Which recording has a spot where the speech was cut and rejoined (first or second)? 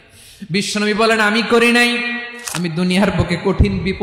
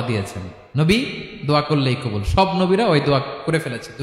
first